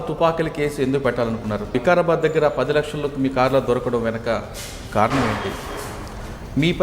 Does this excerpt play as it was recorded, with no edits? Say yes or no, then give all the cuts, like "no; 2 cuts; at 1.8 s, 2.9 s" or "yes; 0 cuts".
no; 1 cut; at 1.7 s